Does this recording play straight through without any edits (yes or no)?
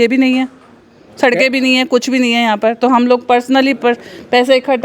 yes